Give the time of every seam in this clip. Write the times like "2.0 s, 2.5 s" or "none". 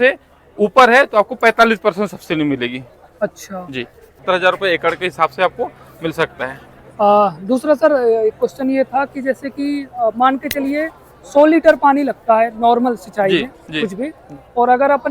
4.2 s